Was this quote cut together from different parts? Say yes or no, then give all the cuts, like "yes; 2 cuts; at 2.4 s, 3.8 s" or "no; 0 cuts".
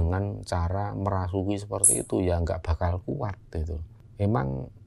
no; 0 cuts